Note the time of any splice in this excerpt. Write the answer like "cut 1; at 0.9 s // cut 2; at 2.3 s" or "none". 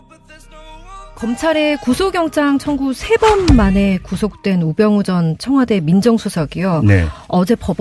none